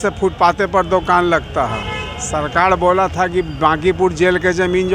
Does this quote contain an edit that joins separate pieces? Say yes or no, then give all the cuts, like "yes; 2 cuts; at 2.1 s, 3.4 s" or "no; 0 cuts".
no; 0 cuts